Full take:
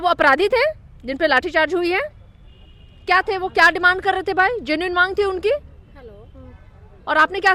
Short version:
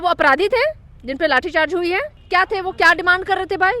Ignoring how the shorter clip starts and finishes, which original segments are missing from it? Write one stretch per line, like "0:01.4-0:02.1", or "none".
0:02.2-0:02.9